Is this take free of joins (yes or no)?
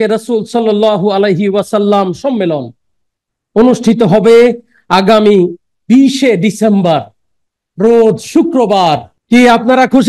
no